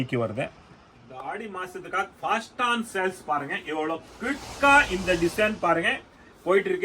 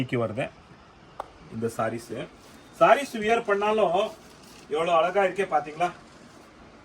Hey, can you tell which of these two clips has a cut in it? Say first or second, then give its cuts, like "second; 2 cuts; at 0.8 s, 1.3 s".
first; 1 cut; at 1.4 s